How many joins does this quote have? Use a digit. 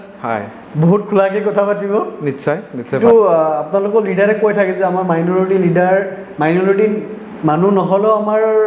1